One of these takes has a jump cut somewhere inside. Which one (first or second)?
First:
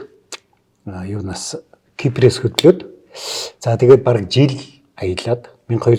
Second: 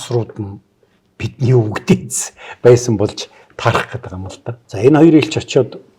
second